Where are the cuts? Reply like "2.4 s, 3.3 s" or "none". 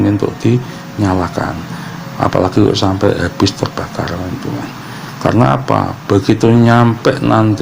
none